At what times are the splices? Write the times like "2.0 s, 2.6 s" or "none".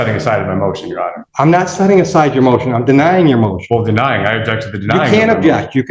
1.2 s

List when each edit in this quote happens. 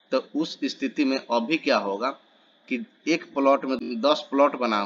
3.8 s

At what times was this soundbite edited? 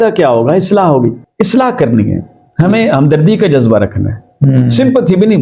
1.2 s

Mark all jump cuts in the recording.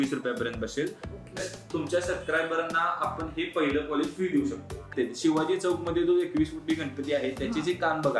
1.4 s, 4.9 s

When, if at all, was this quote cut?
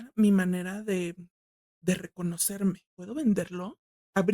2.9 s

